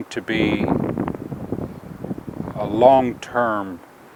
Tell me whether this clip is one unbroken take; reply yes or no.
yes